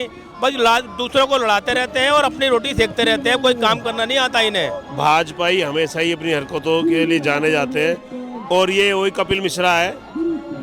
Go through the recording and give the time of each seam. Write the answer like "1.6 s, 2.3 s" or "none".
4.8 s